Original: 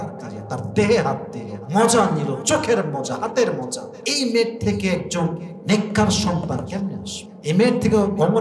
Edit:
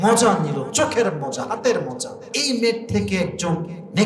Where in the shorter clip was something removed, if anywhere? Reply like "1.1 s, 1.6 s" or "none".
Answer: none